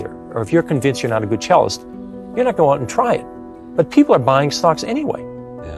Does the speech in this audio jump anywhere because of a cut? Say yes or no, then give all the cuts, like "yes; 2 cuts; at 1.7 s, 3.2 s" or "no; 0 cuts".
no; 0 cuts